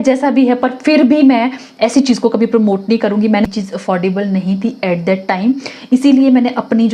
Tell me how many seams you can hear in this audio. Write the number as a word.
one